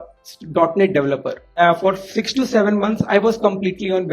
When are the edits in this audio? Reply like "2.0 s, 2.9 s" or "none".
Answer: 1.4 s